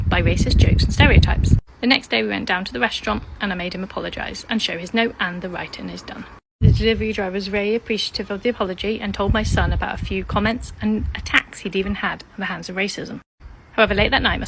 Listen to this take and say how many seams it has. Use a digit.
1